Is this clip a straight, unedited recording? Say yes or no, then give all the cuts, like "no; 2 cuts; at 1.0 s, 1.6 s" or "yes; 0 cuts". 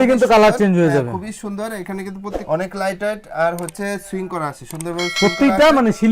yes; 0 cuts